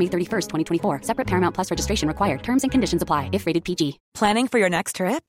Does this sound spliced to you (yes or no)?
yes